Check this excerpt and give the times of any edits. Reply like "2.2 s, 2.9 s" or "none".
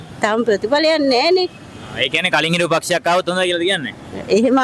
none